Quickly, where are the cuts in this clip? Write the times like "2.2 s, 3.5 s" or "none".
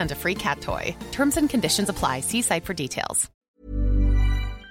3.3 s